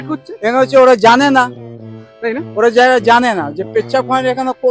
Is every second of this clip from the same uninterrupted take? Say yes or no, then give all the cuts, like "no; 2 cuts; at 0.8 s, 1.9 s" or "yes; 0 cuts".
yes; 0 cuts